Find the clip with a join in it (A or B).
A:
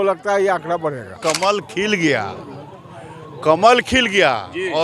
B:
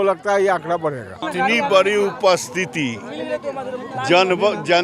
A